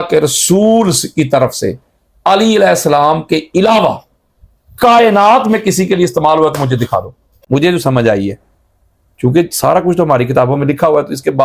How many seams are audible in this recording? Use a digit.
1